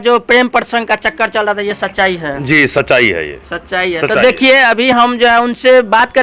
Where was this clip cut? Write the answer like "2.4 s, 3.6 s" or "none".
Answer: none